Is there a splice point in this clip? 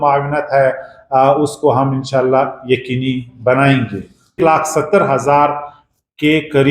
yes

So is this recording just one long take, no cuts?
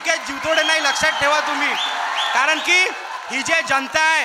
yes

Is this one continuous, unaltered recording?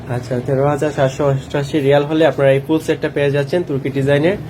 yes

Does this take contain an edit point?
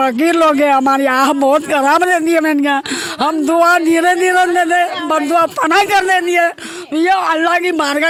no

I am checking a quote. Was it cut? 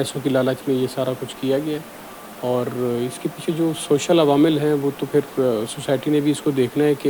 no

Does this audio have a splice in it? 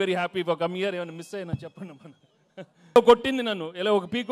yes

